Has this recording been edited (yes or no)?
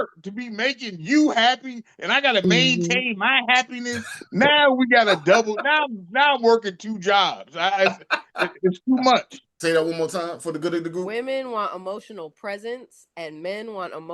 yes